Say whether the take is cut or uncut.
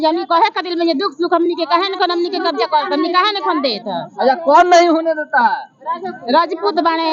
uncut